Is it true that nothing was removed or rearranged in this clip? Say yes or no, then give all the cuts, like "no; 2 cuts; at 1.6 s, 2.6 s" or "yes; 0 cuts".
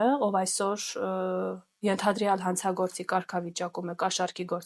yes; 0 cuts